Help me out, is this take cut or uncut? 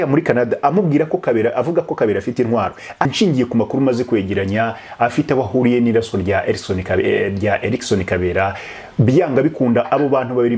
cut